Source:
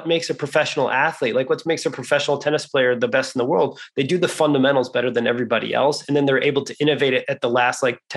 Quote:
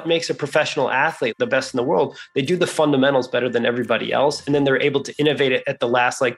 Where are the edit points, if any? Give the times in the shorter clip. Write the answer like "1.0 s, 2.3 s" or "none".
1.3 s